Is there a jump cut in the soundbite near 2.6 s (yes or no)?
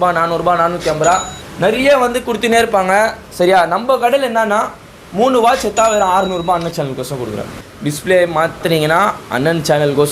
no